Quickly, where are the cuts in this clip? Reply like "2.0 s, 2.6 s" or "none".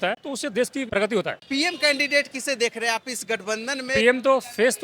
1.0 s, 3.9 s